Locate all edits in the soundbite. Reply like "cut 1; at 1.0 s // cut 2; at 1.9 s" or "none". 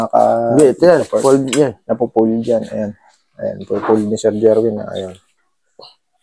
none